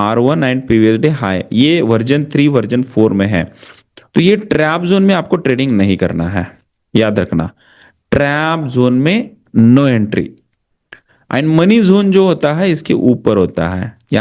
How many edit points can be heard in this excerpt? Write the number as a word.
zero